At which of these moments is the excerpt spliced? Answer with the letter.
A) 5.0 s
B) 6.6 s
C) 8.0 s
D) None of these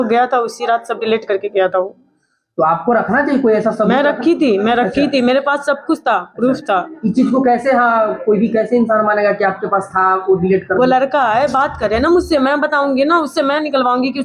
D